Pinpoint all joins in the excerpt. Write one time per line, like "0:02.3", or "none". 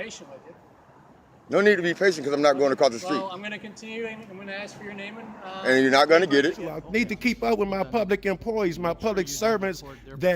0:06.7